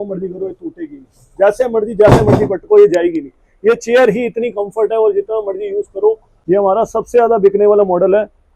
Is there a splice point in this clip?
yes; 1 cut; at 6.3 s

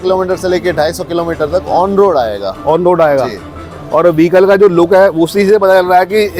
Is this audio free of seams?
yes; 0 cuts

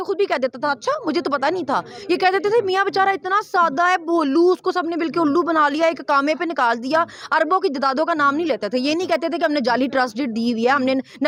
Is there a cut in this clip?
no; 0 cuts

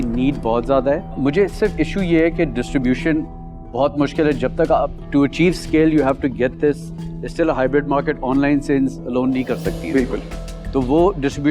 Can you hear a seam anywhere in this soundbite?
no; 0 cuts

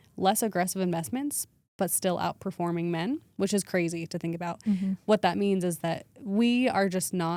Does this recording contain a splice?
no; 0 cuts

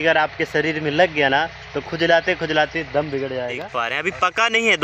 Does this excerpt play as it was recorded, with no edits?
no; 1 cut; at 3.7 s

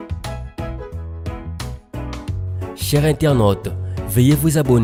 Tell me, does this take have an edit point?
no; 0 cuts

